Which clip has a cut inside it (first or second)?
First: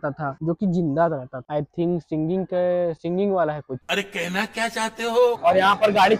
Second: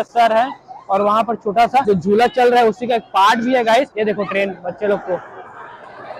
first